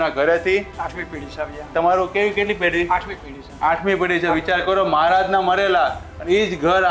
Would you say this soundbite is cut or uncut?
uncut